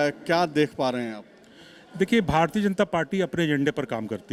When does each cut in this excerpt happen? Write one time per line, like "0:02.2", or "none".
none